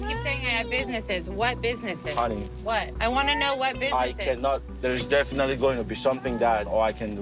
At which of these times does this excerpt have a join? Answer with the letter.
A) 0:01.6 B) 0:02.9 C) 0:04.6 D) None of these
B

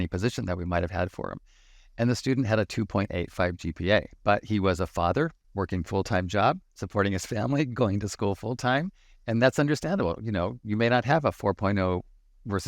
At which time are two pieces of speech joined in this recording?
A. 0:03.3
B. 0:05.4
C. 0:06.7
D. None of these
B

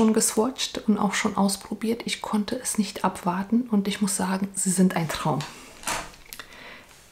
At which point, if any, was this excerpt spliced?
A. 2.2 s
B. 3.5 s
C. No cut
C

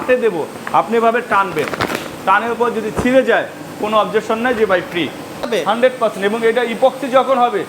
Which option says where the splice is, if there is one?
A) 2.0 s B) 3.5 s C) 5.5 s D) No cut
C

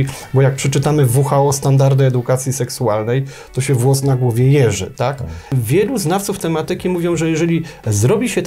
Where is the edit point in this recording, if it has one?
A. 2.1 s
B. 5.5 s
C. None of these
B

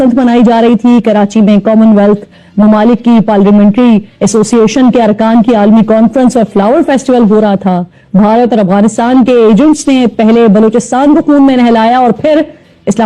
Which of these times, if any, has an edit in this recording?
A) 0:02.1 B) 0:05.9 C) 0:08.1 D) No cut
D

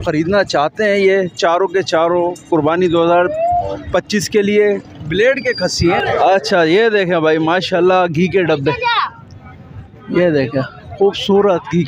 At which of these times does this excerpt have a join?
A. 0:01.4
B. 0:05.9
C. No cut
B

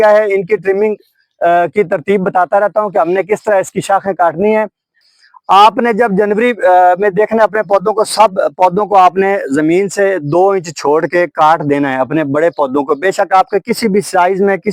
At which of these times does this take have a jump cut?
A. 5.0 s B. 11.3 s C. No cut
A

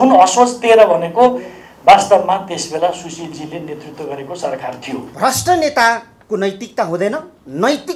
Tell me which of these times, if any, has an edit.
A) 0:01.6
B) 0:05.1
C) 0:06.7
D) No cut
B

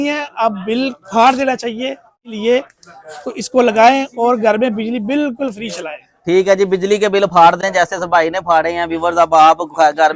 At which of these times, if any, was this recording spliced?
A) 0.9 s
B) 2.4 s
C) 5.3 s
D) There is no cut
B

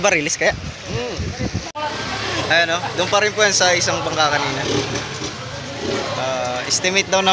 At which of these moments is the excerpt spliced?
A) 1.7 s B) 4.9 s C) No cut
A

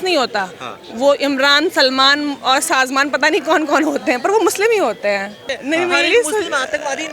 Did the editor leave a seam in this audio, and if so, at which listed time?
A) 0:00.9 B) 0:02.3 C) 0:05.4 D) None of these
C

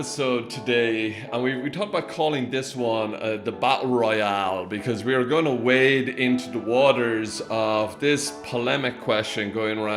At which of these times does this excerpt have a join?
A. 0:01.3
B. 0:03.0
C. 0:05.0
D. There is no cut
A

